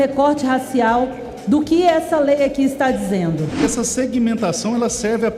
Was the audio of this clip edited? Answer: yes; 1 cut; at 3.6 s

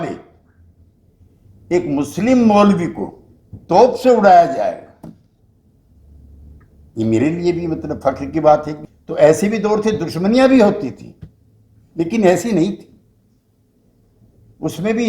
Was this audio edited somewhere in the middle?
yes; 1 cut; at 8.7 s

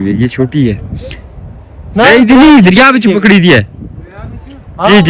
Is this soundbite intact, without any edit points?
yes; 0 cuts

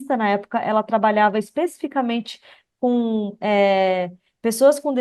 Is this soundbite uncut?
yes; 0 cuts

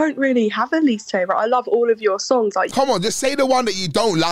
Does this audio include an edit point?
yes; 1 cut; at 2.7 s

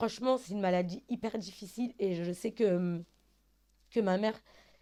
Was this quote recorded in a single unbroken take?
yes; 0 cuts

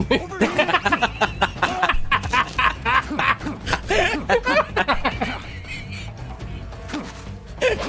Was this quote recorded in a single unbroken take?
yes; 0 cuts

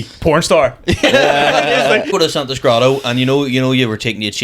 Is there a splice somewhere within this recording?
yes; 1 cut; at 2.1 s

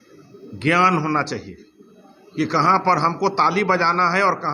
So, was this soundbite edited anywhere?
no; 0 cuts

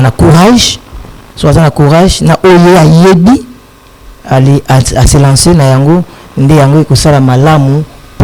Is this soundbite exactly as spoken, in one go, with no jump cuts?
yes; 0 cuts

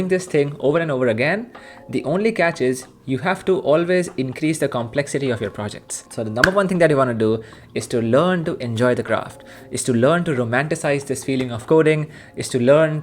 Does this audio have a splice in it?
yes; 1 cut; at 6.0 s

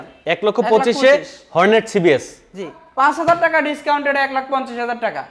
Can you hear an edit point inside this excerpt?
yes; 1 cut; at 2.8 s

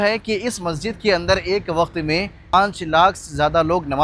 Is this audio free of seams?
yes; 0 cuts

